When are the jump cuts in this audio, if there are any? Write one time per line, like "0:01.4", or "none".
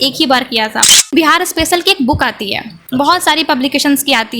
0:01.1